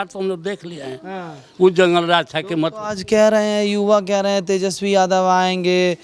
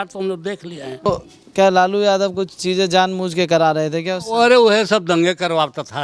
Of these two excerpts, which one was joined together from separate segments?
second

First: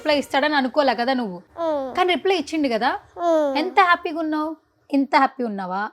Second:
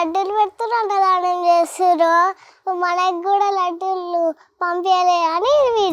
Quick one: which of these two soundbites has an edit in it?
first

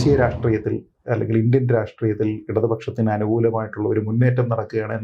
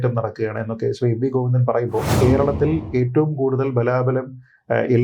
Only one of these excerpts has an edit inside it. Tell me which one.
second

